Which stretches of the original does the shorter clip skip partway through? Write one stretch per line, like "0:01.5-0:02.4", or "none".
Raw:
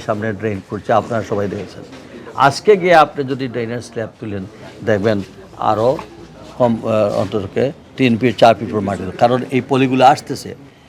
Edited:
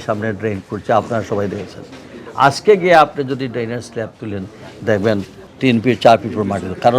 0:05.5-0:07.8